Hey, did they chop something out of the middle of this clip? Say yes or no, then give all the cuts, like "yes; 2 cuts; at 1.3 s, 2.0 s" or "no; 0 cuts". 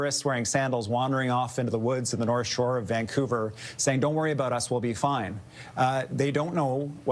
no; 0 cuts